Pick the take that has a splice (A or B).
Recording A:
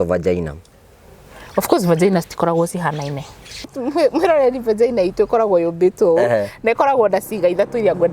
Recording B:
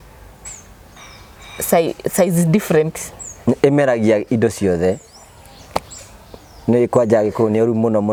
A